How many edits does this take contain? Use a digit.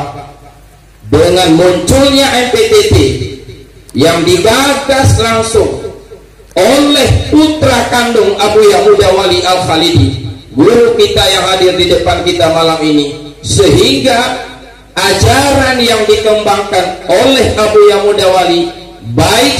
0